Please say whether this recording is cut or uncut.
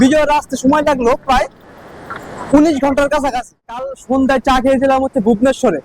cut